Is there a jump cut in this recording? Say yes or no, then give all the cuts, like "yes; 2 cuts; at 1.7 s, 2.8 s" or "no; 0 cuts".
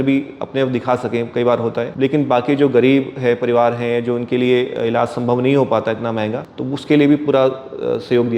yes; 2 cuts; at 1.9 s, 6.5 s